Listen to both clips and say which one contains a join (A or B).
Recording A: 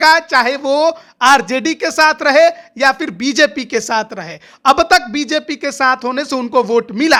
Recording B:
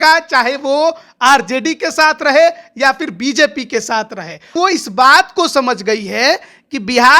B